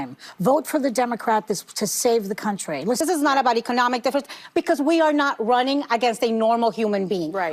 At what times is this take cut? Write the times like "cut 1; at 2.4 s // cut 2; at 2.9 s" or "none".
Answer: cut 1; at 3.0 s